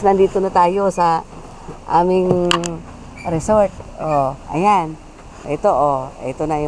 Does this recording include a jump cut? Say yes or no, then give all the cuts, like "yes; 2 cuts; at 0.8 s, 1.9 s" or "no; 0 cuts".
yes; 1 cut; at 5.5 s